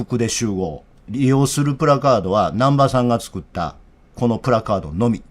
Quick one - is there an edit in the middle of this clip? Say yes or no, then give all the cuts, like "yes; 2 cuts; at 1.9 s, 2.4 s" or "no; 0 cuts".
yes; 1 cut; at 1.1 s